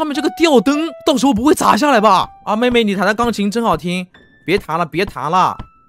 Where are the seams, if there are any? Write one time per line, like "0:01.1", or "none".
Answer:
0:02.3